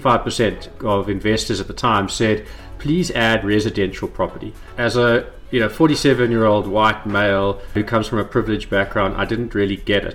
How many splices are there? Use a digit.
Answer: 1